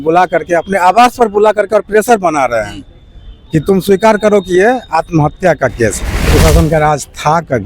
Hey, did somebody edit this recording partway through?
yes; 1 cut; at 6.2 s

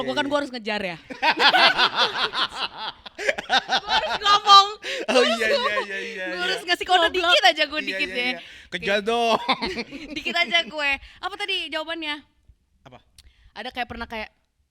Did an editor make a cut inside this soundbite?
no; 0 cuts

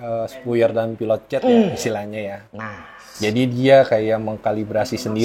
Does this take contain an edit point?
no; 0 cuts

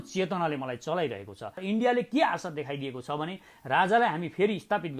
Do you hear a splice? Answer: yes; 1 cut; at 1.5 s

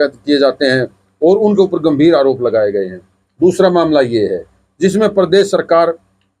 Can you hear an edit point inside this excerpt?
no; 0 cuts

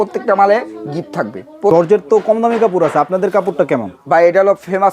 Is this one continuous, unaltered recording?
no; 1 cut; at 1.7 s

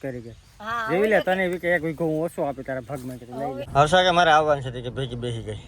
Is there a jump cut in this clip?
yes; 1 cut; at 3.7 s

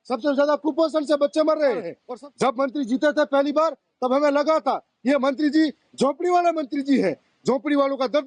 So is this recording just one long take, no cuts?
no; 1 cut; at 2.0 s

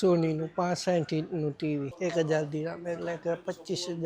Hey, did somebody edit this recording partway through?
yes; 1 cut; at 1.9 s

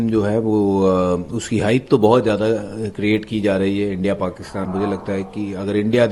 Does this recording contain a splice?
yes; 1 cut; at 4.7 s

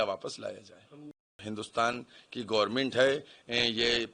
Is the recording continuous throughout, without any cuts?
no; 1 cut; at 1.2 s

